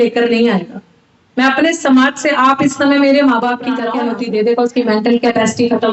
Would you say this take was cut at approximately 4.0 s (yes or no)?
yes